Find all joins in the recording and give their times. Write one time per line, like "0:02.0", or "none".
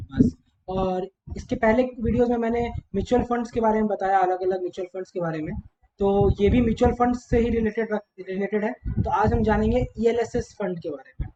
none